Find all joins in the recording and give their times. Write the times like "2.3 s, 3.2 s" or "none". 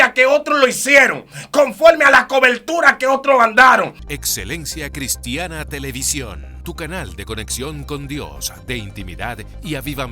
4.0 s